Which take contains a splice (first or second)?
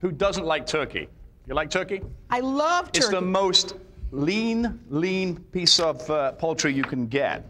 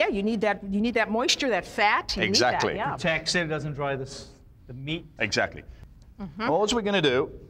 second